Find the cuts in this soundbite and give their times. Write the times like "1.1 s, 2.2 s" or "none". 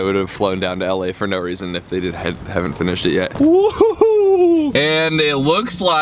4.7 s